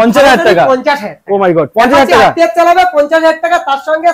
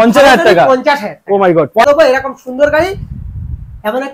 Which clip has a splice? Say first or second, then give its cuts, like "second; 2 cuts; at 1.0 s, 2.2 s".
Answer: second; 1 cut; at 1.8 s